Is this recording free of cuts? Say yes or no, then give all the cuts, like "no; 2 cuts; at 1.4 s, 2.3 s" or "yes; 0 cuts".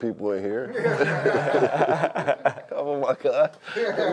yes; 0 cuts